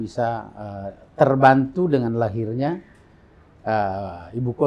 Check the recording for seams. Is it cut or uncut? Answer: uncut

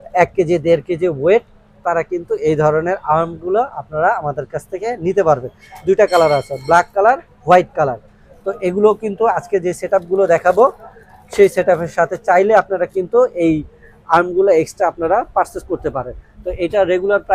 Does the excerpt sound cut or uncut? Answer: uncut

